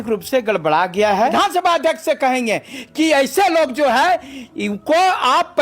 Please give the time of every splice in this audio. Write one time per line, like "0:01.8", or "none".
0:01.3